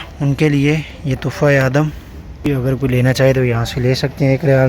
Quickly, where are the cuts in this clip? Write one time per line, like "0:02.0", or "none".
0:02.5